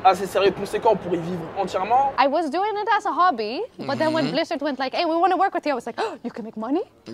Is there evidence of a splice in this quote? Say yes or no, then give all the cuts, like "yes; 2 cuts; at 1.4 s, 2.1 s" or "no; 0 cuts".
yes; 1 cut; at 2.1 s